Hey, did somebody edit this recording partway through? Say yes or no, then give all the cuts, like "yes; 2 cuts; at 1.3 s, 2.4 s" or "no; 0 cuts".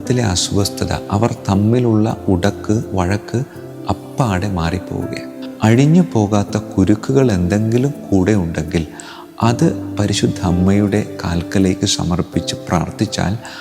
yes; 1 cut; at 5.3 s